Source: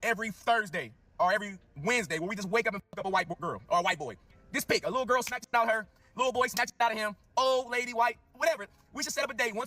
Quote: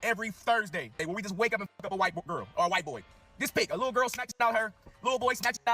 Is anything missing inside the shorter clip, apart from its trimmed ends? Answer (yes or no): yes